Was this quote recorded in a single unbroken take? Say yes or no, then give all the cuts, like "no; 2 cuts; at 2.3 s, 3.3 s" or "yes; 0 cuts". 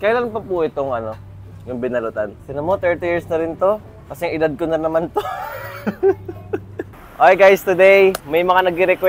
no; 2 cuts; at 2.4 s, 6.8 s